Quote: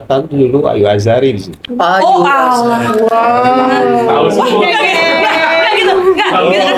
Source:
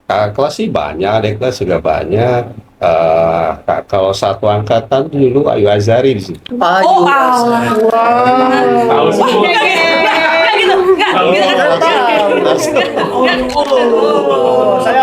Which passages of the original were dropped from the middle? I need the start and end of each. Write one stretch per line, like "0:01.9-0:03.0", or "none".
none